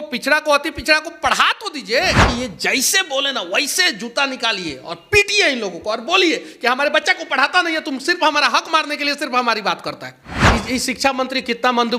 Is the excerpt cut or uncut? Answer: cut